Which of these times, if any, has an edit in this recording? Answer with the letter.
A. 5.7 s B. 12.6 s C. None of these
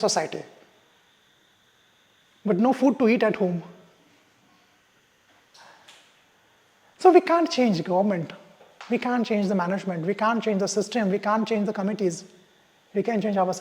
C